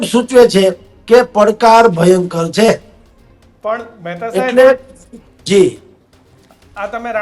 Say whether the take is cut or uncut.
uncut